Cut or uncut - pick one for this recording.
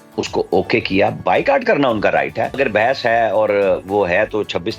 cut